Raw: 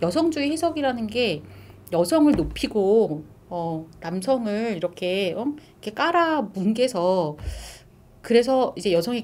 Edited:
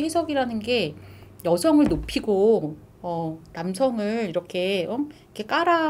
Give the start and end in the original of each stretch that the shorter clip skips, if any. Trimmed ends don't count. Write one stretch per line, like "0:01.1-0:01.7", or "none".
none